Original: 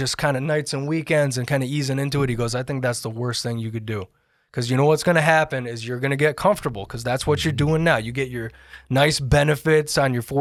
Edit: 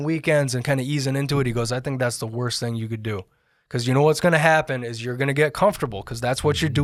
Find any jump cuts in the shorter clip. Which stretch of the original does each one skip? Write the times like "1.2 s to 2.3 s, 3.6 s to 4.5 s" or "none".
none